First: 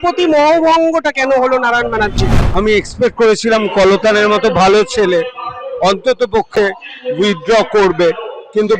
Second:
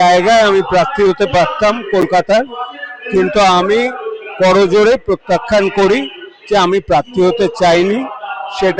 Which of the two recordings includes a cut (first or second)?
first